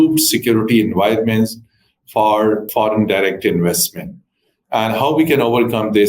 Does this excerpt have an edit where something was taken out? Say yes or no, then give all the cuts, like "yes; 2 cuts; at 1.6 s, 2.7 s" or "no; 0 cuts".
yes; 1 cut; at 2.7 s